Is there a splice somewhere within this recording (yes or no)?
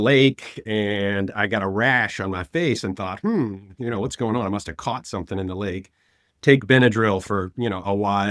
no